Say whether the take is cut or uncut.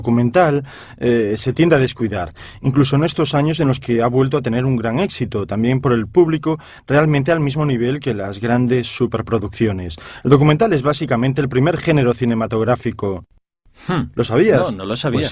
uncut